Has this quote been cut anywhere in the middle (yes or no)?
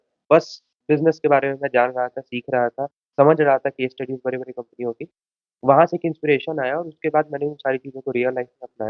no